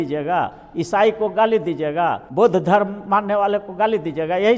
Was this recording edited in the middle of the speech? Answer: yes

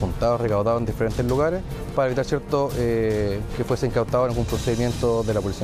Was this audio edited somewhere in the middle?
no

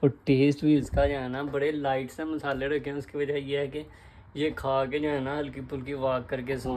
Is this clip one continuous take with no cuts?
yes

